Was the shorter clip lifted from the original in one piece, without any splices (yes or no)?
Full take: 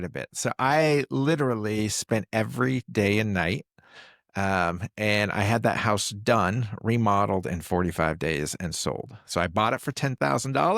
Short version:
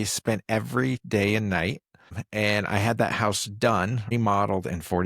no